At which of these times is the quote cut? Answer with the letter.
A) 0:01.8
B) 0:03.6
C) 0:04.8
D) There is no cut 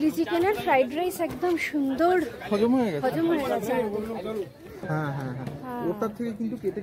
C